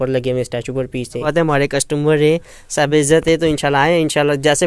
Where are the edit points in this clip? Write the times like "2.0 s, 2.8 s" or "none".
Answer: 1.3 s